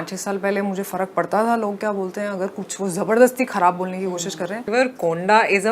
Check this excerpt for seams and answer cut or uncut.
cut